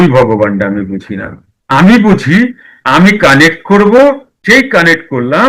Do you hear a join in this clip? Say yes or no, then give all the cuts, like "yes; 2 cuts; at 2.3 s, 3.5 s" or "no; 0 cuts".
yes; 1 cut; at 4.3 s